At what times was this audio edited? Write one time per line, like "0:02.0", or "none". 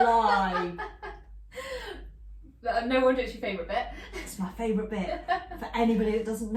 none